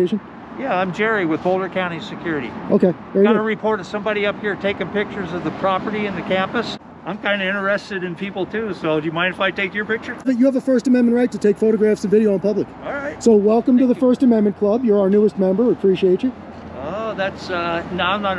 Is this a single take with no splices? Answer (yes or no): no